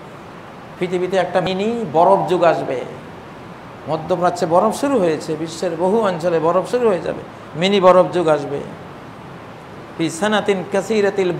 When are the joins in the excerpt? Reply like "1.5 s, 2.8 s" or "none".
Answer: 1.4 s